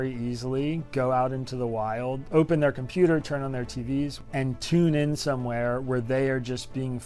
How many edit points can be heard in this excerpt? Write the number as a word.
one